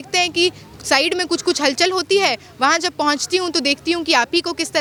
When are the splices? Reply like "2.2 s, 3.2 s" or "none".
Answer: none